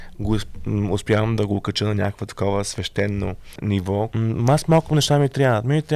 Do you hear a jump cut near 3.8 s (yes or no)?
yes